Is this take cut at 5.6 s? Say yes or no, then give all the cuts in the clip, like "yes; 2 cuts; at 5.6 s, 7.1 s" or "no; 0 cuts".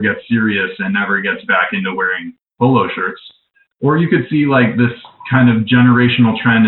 no; 0 cuts